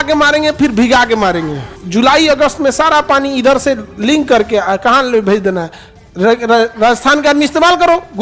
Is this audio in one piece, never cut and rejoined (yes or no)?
no